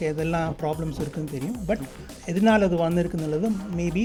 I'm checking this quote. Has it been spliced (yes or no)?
no